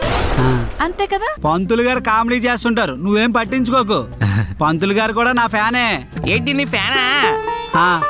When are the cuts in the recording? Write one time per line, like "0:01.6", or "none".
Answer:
0:01.4